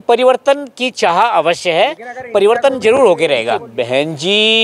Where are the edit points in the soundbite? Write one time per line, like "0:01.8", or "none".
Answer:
0:03.7